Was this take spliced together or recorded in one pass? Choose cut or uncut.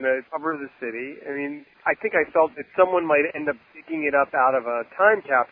cut